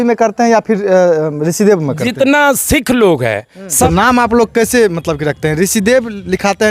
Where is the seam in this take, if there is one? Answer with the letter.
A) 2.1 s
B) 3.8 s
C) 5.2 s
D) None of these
B